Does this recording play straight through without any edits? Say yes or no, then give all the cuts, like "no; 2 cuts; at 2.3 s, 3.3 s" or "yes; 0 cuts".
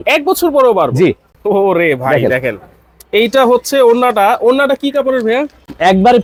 yes; 0 cuts